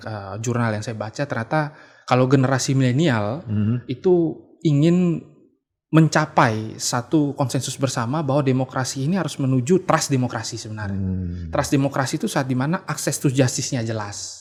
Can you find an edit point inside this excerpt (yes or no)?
no